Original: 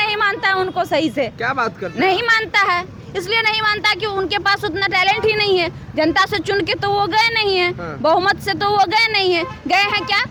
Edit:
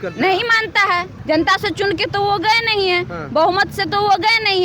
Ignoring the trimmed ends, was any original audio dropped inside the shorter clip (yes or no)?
yes